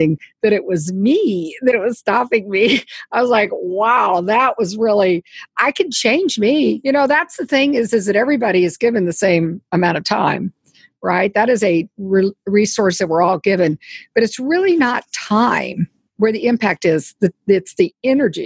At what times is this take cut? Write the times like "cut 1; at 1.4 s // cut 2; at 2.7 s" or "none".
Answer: cut 1; at 6.8 s